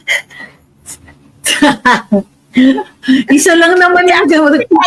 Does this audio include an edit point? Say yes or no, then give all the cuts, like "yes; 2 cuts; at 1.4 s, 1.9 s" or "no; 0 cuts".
no; 0 cuts